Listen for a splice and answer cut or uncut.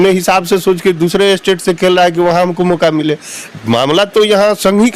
uncut